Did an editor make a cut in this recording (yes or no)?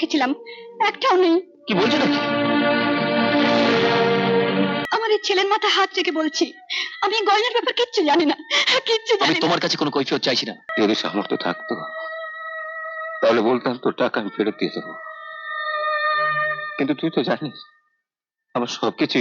yes